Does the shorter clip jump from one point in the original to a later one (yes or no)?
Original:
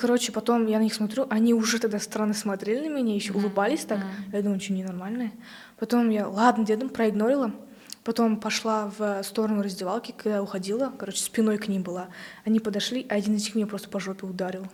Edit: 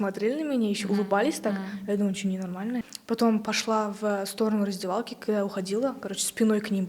yes